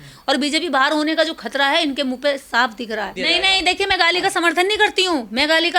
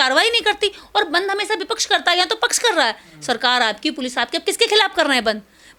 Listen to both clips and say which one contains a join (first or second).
first